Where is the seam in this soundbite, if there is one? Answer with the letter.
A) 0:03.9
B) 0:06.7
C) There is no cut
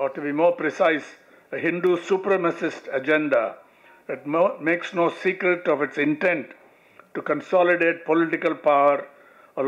C